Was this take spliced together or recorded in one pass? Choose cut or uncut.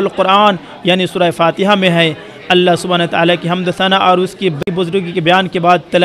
cut